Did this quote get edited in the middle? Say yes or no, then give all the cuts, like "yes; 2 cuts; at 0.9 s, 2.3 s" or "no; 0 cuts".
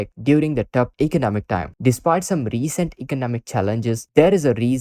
yes; 1 cut; at 1.7 s